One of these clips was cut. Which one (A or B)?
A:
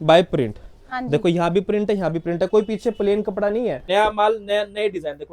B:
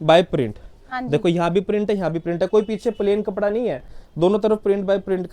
A